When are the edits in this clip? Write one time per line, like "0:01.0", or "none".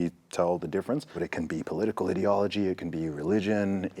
0:01.2